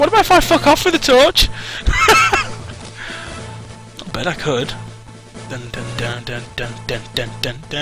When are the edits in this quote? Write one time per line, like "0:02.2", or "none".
0:05.1